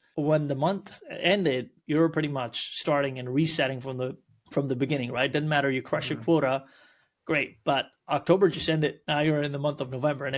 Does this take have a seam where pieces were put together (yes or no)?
no